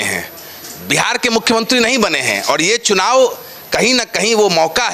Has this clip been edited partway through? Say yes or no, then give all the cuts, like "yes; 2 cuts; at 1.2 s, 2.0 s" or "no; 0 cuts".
no; 0 cuts